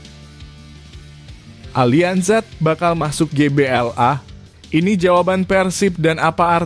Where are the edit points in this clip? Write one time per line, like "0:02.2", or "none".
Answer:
0:01.7

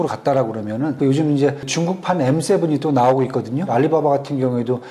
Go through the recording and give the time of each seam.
0:00.9
0:01.7
0:03.7

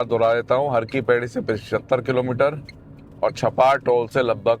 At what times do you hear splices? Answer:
none

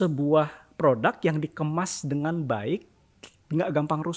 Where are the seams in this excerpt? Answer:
none

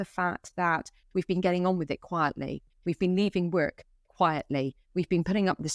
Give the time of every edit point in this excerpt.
none

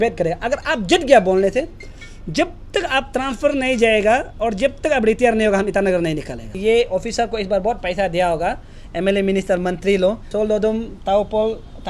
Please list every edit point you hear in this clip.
0:06.5
0:10.3

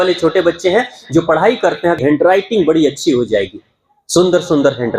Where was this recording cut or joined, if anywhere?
0:02.0

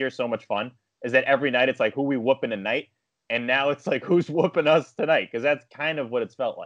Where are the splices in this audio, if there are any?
none

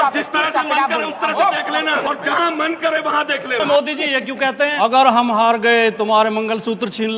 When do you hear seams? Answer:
0:02.0
0:03.6
0:04.7

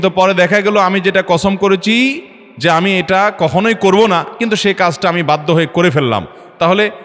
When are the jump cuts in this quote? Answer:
none

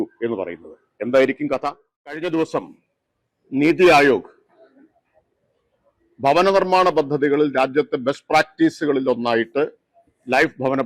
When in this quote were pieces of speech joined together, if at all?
0:02.2

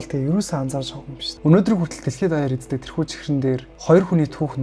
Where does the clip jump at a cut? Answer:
0:01.2

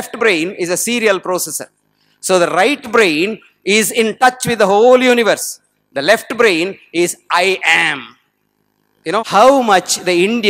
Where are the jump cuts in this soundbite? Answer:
0:09.3

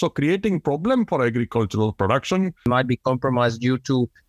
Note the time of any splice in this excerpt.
0:02.6

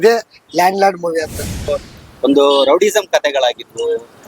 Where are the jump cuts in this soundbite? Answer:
0:01.6

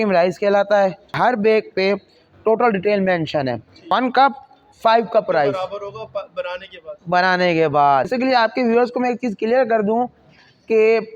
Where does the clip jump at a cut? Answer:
0:01.1
0:03.9
0:08.1

